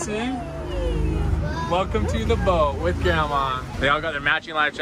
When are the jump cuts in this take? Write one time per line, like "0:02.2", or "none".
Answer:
0:03.7